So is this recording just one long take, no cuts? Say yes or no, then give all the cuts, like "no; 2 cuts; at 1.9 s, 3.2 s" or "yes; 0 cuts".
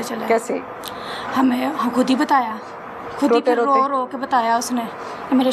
yes; 0 cuts